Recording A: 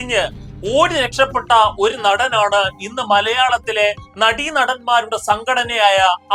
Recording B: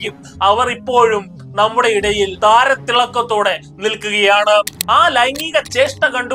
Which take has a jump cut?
B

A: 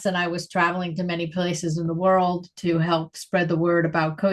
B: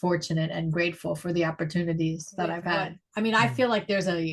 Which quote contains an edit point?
B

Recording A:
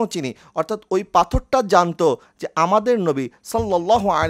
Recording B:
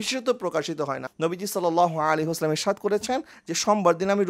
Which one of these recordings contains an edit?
B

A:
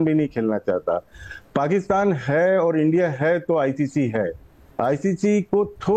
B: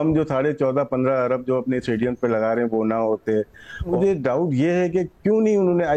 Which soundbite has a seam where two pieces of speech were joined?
B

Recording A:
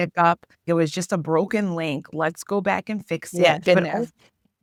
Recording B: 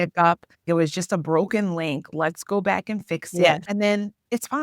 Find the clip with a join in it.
B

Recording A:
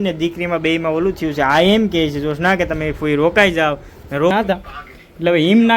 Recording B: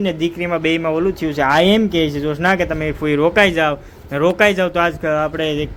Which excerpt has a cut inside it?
A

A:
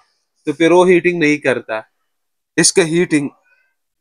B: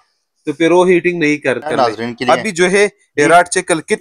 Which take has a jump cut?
B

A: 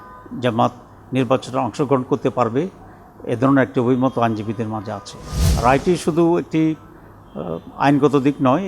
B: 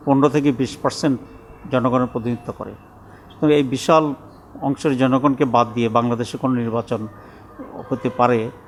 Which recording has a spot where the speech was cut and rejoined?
A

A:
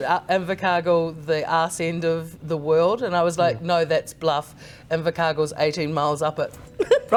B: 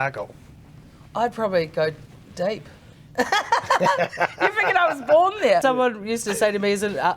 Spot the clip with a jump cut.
B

